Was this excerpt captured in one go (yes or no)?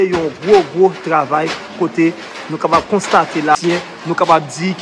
no